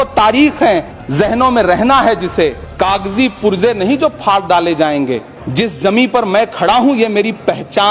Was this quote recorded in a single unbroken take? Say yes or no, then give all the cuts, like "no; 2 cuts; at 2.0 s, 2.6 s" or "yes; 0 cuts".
no; 3 cuts; at 1.0 s, 2.6 s, 5.4 s